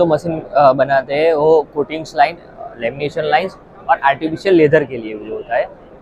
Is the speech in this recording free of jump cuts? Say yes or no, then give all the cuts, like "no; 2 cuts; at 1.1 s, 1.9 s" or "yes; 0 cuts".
yes; 0 cuts